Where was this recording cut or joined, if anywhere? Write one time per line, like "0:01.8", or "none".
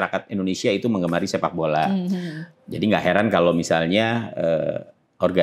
none

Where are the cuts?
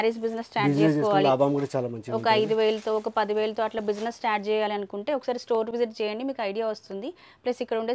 none

